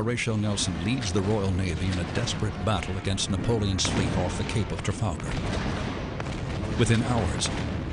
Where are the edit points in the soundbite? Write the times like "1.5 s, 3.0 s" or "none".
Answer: 3.2 s